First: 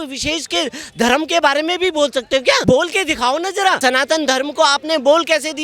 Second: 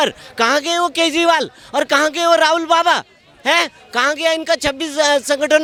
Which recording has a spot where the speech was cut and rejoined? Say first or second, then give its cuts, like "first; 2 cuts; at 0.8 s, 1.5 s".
first; 2 cuts; at 2.6 s, 3.8 s